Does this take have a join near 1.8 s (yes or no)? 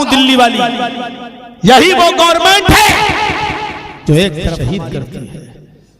no